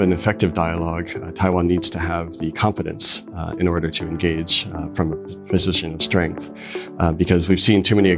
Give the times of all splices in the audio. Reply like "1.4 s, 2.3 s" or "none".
none